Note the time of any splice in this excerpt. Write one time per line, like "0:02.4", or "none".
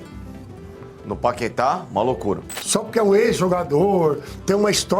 0:02.5